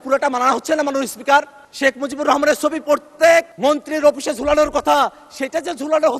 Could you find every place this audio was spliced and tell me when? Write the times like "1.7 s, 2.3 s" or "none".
1.6 s, 3.5 s